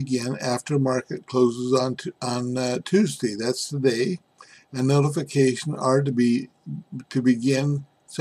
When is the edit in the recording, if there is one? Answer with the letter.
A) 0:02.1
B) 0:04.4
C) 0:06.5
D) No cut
C